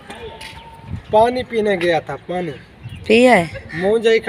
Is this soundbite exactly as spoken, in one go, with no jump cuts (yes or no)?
yes